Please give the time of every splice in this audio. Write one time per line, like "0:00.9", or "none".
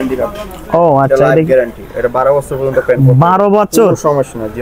none